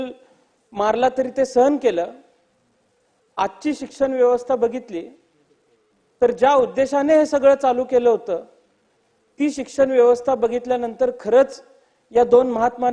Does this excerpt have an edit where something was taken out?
no; 0 cuts

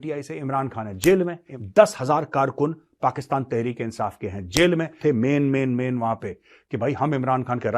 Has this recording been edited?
yes; 2 cuts; at 1.5 s, 5.0 s

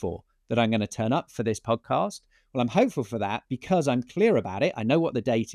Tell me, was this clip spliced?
no; 0 cuts

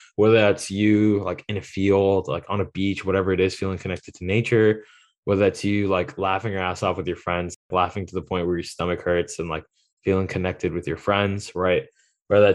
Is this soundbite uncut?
yes; 0 cuts

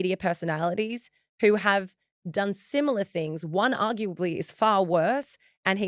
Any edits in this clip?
no; 0 cuts

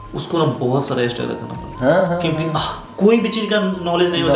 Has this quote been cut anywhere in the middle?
no; 0 cuts

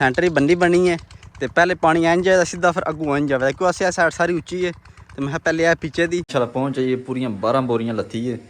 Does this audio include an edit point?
yes; 1 cut; at 6.3 s

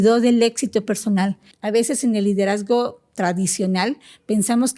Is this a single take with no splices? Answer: no; 1 cut; at 1.5 s

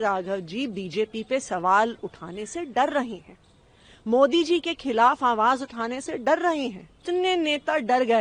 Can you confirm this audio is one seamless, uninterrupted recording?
no; 1 cut; at 6.9 s

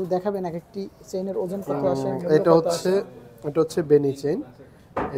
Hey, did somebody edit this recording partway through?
no; 0 cuts

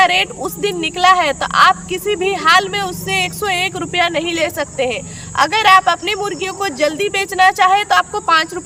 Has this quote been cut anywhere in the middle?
no; 0 cuts

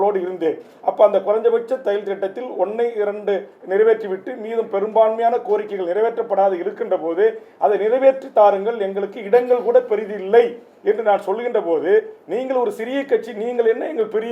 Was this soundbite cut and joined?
no; 0 cuts

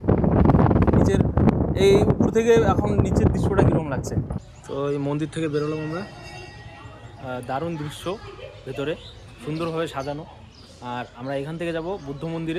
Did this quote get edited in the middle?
yes; 1 cut; at 4.4 s

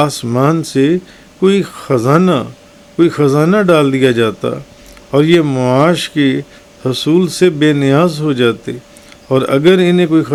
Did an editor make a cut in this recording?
no; 0 cuts

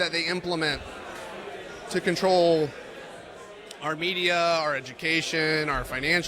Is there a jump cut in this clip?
no; 0 cuts

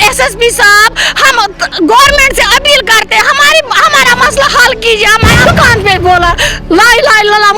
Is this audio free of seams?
no; 1 cut; at 5.4 s

